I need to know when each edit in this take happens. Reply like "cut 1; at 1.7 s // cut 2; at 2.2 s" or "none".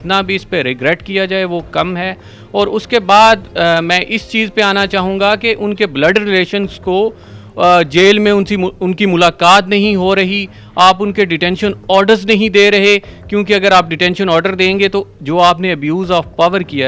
none

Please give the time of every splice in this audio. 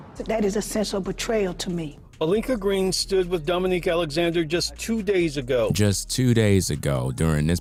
none

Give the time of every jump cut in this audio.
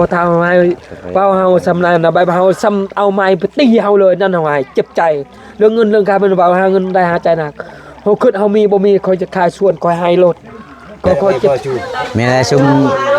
cut 1; at 11.5 s

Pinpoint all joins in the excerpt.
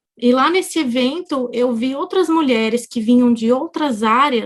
none

